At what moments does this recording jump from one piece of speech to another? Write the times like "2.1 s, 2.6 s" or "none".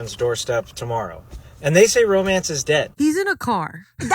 2.9 s